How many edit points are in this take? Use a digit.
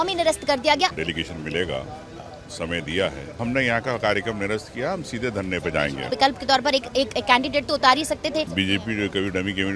4